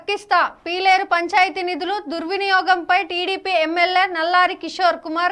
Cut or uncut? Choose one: uncut